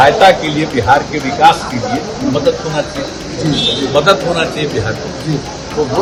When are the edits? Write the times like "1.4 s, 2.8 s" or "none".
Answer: none